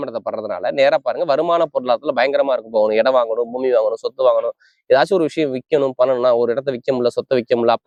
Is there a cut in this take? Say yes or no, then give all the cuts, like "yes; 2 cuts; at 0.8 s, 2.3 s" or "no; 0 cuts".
no; 0 cuts